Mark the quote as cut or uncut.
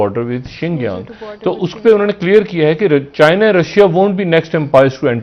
uncut